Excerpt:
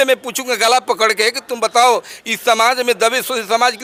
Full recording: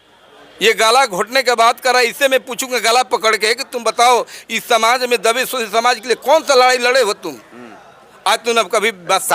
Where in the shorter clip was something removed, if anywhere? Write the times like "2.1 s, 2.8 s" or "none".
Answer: none